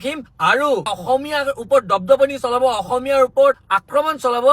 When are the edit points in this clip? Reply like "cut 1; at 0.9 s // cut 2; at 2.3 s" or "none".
cut 1; at 0.9 s